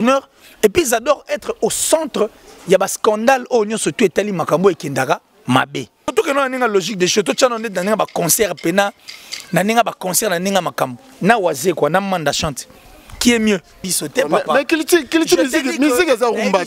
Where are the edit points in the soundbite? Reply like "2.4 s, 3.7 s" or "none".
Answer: 6.0 s, 13.9 s